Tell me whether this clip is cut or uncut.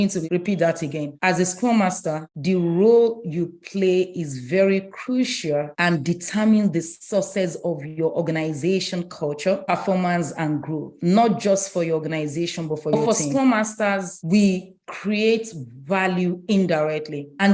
cut